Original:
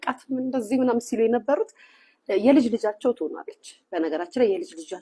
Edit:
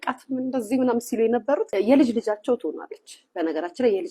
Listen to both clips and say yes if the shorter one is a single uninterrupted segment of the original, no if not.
no